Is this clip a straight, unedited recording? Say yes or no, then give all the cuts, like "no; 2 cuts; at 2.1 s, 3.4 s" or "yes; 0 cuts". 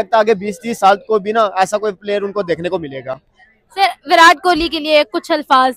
yes; 0 cuts